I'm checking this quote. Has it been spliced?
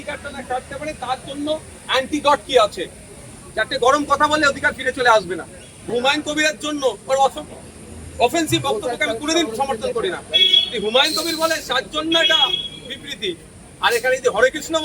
yes; 1 cut; at 5.8 s

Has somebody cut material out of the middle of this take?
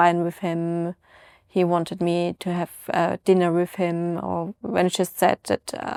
no; 0 cuts

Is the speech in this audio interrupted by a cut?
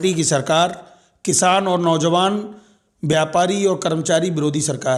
no; 0 cuts

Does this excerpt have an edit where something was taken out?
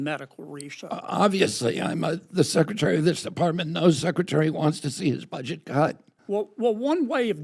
yes; 1 cut; at 6.1 s

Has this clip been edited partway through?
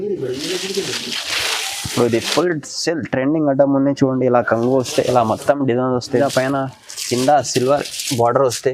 yes; 1 cut; at 6.2 s

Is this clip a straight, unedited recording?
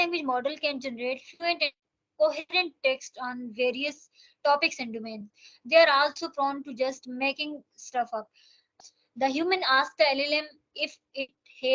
no; 1 cut; at 8.7 s

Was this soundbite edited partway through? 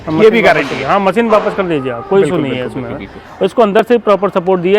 yes; 1 cut; at 3.2 s

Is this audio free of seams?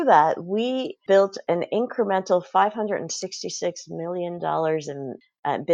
no; 1 cut; at 0.9 s

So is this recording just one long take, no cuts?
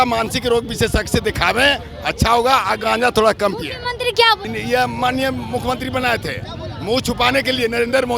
no; 1 cut; at 4.4 s

